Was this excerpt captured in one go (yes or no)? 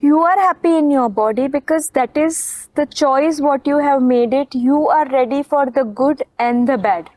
yes